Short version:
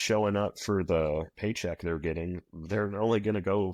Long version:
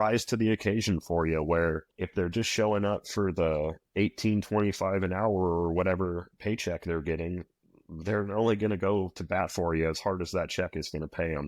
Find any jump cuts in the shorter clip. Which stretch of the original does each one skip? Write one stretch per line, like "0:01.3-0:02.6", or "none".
0:03.8-0:06.3
0:07.5-0:07.9